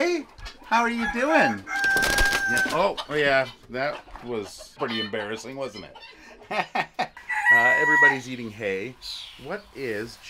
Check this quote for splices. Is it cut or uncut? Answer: cut